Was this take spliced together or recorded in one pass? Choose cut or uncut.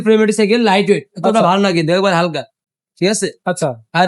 uncut